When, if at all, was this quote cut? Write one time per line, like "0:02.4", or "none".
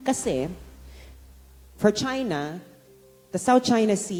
none